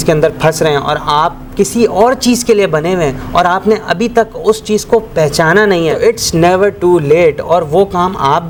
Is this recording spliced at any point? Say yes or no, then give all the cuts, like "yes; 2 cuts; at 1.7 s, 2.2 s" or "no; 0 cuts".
no; 0 cuts